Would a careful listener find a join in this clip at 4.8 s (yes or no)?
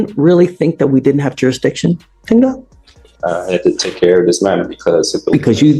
no